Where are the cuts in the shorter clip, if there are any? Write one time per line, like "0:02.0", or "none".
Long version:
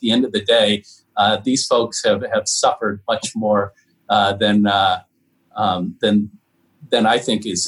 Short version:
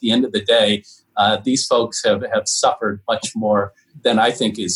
0:03.8